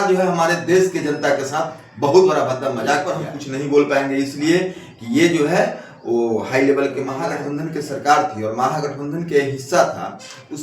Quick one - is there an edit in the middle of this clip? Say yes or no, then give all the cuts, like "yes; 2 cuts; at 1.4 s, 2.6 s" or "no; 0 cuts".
yes; 2 cuts; at 3.3 s, 7.2 s